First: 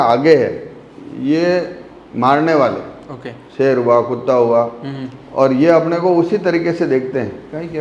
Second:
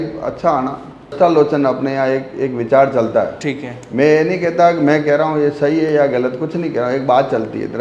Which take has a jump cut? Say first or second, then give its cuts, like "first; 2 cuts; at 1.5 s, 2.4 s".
second; 1 cut; at 1.1 s